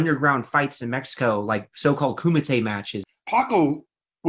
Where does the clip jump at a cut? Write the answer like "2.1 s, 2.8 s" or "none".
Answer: 3.0 s